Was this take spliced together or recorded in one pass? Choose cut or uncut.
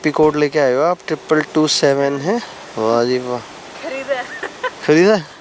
uncut